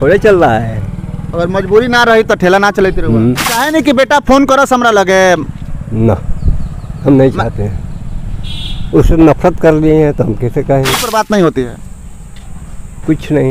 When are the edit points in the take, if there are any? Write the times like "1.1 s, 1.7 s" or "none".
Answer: 3.6 s, 11.0 s